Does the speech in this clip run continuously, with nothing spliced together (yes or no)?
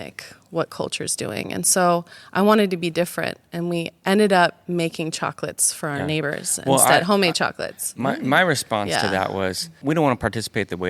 no